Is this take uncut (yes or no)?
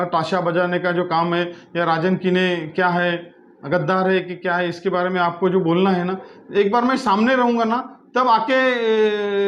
yes